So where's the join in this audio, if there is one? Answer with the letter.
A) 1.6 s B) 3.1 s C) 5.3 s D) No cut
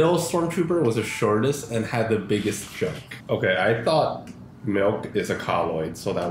B